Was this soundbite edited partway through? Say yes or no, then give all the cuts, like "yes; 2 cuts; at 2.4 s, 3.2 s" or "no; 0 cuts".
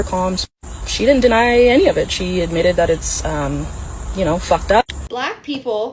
yes; 1 cut; at 5.0 s